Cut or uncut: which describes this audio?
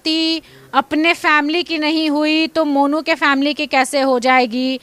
uncut